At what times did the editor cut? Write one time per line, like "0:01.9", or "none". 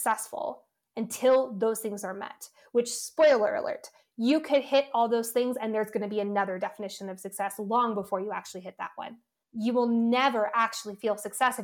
0:09.4